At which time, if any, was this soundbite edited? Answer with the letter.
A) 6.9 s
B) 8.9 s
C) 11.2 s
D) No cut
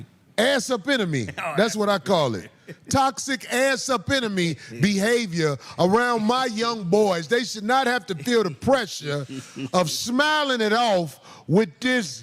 B